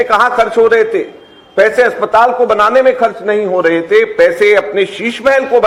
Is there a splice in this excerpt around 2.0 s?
no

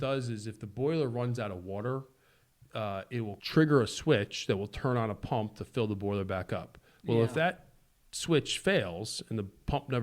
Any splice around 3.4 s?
yes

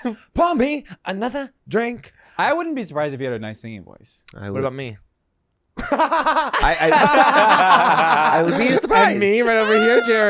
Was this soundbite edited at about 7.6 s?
no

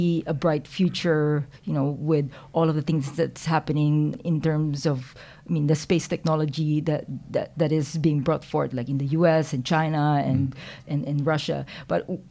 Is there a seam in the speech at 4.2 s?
yes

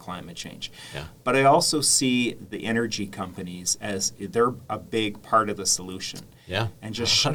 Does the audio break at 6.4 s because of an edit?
no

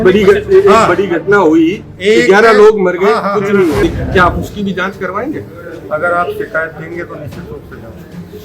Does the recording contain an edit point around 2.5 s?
no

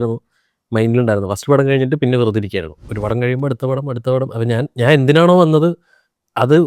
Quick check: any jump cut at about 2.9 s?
yes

